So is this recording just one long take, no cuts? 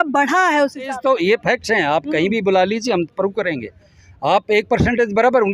no; 1 cut; at 1.0 s

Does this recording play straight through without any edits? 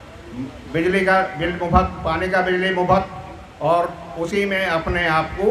yes; 0 cuts

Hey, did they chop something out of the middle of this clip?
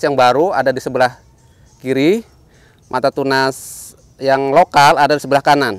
no; 0 cuts

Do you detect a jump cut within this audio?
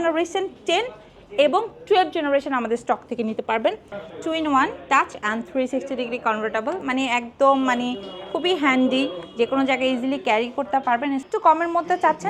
yes; 2 cuts; at 4.0 s, 11.2 s

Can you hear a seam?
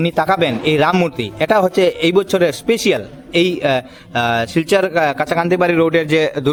no; 0 cuts

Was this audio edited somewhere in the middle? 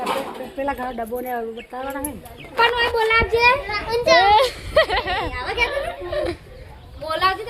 yes; 1 cut; at 2.5 s

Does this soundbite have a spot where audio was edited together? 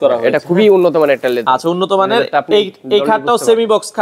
no; 0 cuts

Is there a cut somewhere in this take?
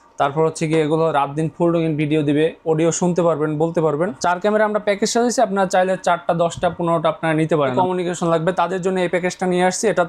yes; 2 cuts; at 4.2 s, 7.7 s

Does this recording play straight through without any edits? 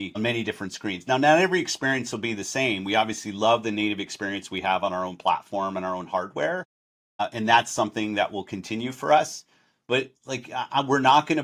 yes; 0 cuts

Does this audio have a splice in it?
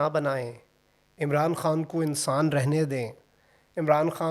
no; 0 cuts

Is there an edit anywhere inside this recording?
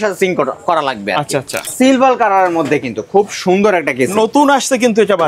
yes; 1 cut; at 1.7 s

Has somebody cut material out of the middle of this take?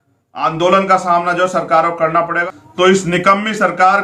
yes; 1 cut; at 2.4 s

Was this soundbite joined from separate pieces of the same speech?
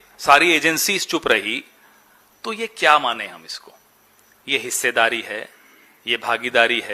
no; 0 cuts

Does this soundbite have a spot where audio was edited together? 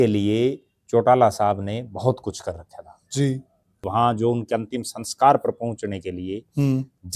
yes; 1 cut; at 3.9 s

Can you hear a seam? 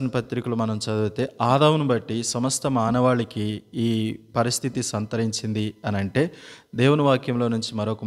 no; 0 cuts

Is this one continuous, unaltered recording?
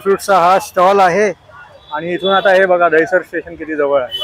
yes; 0 cuts

